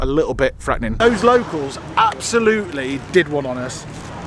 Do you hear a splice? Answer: yes; 1 cut; at 0.9 s

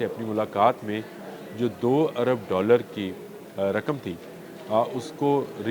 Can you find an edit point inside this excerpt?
no; 0 cuts

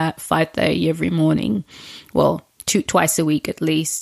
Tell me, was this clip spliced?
no; 0 cuts

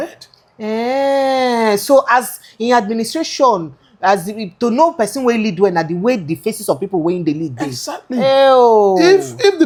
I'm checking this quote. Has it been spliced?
no; 0 cuts

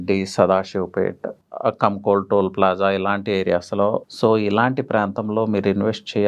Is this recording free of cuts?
no; 2 cuts; at 1.3 s, 4.1 s

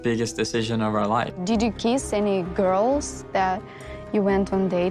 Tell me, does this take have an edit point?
yes; 1 cut; at 1.3 s

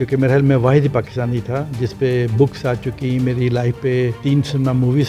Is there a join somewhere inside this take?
yes; 1 cut; at 4.2 s

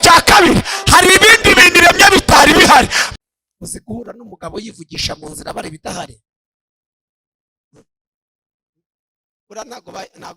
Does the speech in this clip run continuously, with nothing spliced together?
no; 1 cut; at 3.0 s

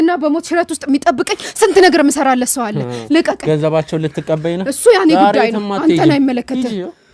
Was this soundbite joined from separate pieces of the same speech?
no; 0 cuts

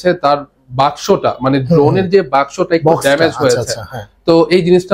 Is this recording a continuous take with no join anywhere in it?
yes; 0 cuts

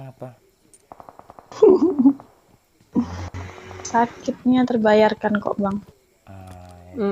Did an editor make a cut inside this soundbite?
no; 0 cuts

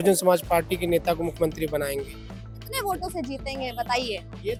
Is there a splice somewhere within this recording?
no; 0 cuts

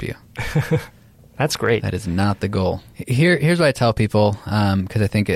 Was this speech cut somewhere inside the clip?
no; 0 cuts

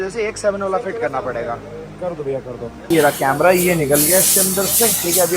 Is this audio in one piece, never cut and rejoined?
no; 1 cut; at 2.8 s

